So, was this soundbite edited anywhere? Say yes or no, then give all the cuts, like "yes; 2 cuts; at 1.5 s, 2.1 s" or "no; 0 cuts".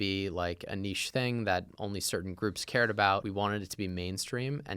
yes; 1 cut; at 3.2 s